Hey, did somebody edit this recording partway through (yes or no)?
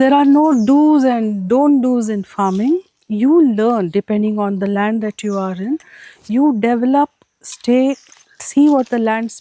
no